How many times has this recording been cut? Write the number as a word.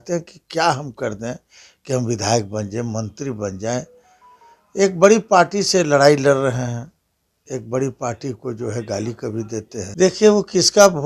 one